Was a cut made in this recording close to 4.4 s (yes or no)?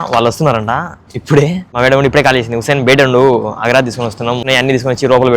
yes